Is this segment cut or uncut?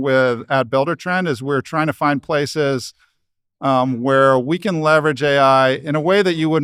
uncut